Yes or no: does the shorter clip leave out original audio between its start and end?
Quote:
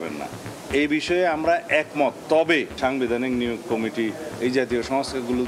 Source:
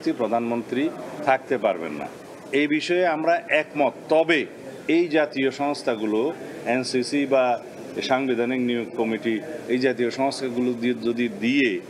yes